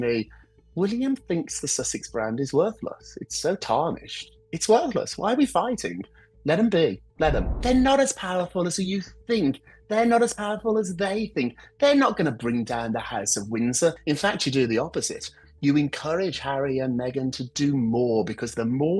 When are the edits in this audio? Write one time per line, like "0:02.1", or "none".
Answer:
0:07.4
0:14.0